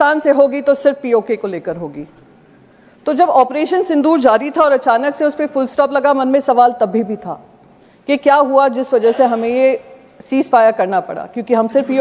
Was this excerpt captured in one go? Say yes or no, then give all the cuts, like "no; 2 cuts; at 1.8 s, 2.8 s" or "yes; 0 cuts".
yes; 0 cuts